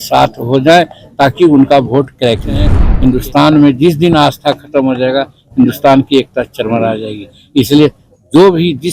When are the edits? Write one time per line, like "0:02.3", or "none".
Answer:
0:02.8